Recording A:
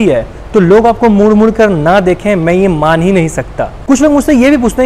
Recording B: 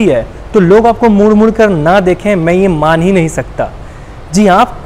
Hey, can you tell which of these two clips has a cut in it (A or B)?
A